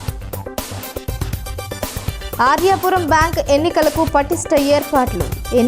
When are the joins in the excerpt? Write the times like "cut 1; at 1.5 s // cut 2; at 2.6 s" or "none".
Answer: none